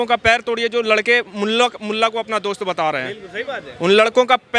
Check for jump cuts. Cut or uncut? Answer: uncut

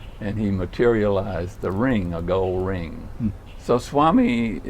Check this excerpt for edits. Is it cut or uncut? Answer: cut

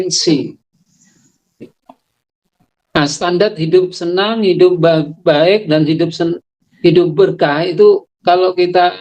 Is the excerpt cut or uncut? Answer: cut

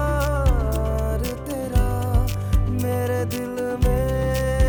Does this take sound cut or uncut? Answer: uncut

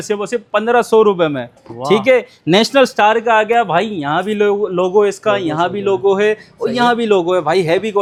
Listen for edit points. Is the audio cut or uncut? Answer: uncut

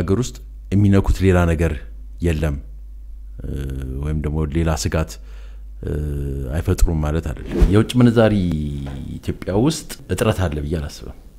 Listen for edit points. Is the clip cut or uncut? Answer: cut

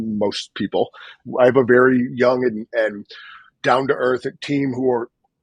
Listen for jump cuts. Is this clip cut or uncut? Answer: cut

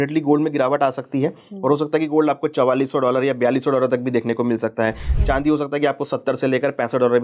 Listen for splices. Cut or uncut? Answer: uncut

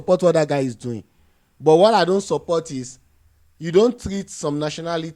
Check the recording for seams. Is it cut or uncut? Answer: uncut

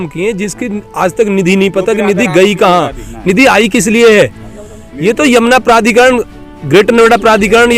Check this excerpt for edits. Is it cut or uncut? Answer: uncut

